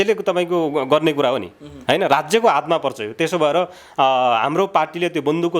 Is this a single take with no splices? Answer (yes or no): yes